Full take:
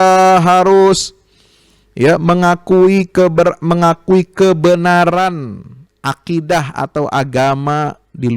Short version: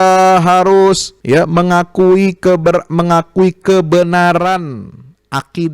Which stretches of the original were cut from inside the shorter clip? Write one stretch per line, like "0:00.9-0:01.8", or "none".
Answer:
0:01.1-0:01.8